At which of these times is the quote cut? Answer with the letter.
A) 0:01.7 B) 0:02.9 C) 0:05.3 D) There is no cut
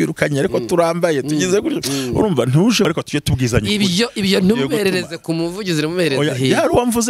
B